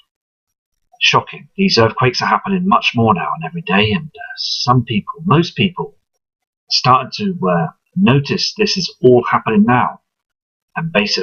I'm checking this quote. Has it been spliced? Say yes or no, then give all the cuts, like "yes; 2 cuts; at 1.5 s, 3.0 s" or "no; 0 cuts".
no; 0 cuts